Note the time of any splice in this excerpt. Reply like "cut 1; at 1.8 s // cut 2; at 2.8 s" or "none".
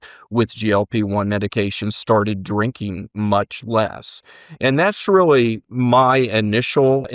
none